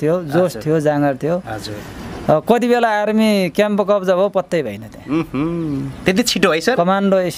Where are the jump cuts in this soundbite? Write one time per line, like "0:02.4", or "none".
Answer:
none